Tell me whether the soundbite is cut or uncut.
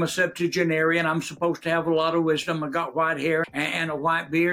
cut